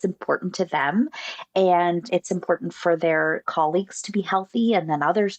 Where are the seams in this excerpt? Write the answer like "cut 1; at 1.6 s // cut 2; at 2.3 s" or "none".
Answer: cut 1; at 2.0 s // cut 2; at 3.4 s